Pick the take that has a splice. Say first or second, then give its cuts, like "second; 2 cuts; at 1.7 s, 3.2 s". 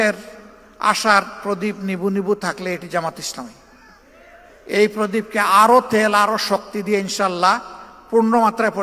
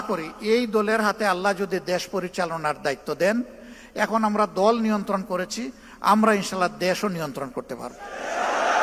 first; 1 cut; at 4.5 s